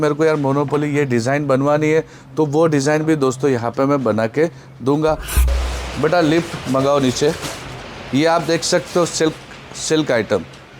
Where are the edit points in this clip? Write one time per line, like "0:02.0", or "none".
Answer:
0:05.4